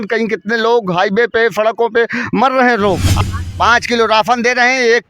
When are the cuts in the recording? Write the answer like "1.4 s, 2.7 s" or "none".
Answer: 3.2 s